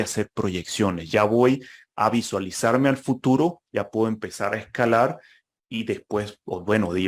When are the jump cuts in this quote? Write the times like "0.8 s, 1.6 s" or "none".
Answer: none